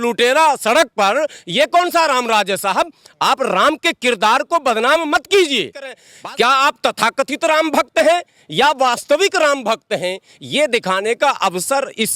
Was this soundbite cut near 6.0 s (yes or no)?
yes